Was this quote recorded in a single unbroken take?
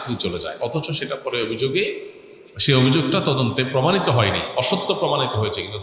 yes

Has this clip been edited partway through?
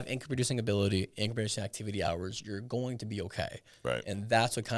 no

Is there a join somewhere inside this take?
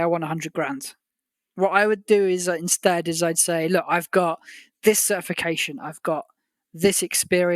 no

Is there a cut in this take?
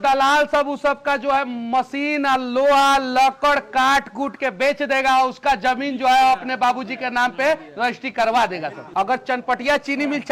yes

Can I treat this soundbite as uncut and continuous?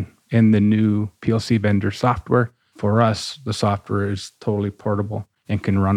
no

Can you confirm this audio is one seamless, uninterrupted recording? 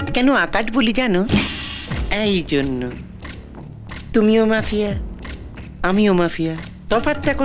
no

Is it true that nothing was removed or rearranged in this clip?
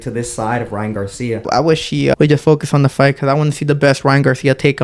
no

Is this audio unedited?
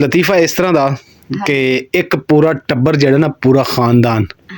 yes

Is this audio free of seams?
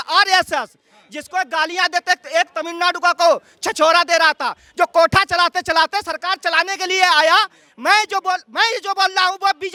yes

